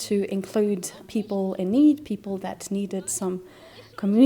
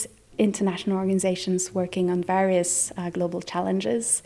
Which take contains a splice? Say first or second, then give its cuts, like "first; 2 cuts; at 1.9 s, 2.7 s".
first; 1 cut; at 1.0 s